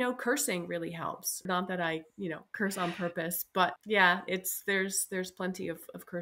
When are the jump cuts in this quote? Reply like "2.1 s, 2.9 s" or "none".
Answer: 1.4 s, 3.7 s